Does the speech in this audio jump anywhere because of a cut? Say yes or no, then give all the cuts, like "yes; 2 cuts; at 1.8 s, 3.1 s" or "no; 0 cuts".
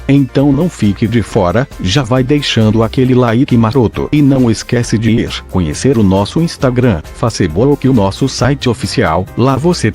yes; 1 cut; at 1.2 s